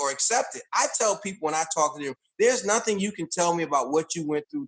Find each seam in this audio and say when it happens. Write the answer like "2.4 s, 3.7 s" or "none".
none